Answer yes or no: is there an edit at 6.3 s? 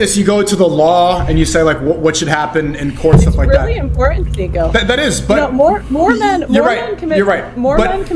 no